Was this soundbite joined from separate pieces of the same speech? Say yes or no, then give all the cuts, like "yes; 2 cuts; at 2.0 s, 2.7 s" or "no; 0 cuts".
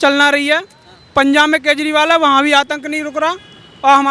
no; 0 cuts